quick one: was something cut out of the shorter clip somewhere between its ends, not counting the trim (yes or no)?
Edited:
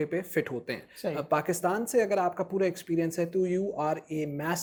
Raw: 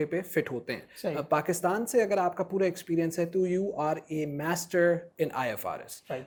no